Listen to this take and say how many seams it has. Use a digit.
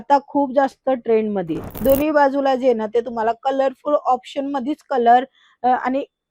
1